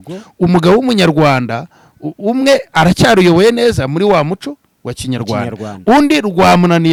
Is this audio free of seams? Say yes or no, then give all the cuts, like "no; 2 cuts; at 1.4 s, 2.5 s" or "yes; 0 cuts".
yes; 0 cuts